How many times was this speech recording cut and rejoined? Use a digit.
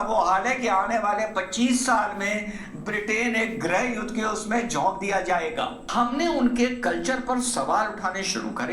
1